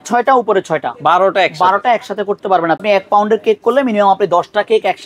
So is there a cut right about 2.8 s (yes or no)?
yes